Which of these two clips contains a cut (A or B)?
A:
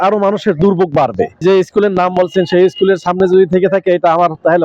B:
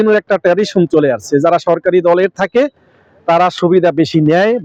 A